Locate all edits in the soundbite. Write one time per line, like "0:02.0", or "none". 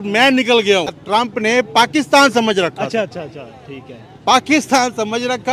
0:01.0